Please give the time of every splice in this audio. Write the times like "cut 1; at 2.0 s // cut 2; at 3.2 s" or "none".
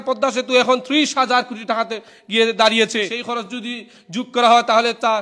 cut 1; at 3.2 s